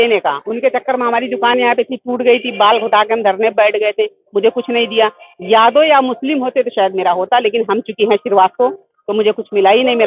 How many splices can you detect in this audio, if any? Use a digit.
0